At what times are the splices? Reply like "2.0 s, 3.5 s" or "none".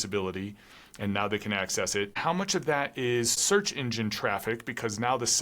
2.1 s, 3.4 s